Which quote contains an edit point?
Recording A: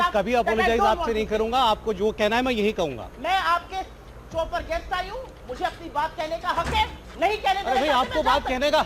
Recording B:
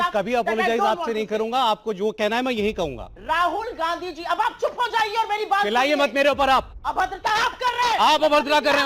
B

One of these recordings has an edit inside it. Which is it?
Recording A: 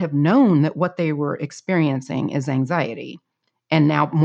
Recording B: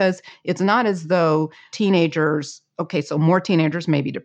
B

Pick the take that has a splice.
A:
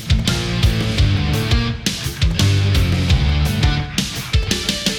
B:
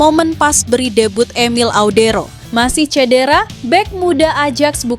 B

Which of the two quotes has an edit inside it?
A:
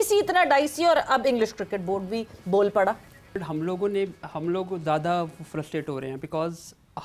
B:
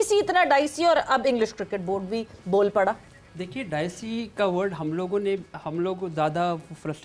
A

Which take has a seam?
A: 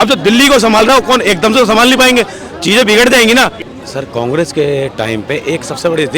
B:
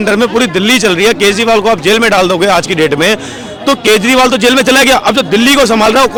A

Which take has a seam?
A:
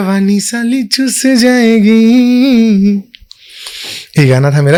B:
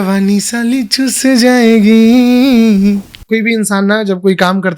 B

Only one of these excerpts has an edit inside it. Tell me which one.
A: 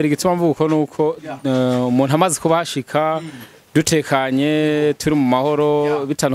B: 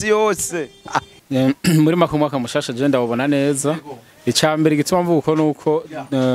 B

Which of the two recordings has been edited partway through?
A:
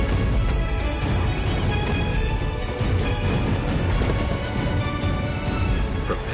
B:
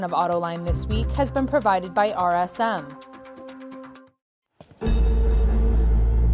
B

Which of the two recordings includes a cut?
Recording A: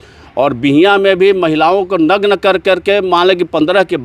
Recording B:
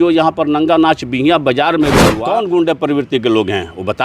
B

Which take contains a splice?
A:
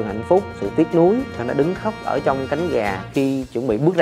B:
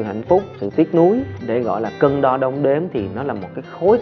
A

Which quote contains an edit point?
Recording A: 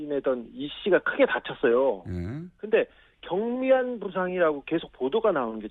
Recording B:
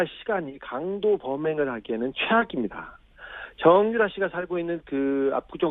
A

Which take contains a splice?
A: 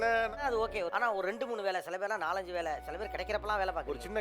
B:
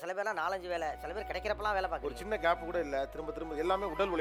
A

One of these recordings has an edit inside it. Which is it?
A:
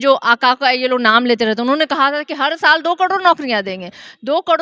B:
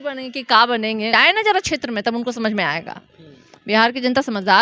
B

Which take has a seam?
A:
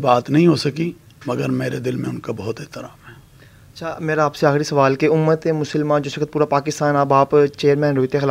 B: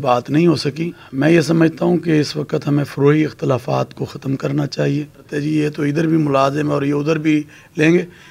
B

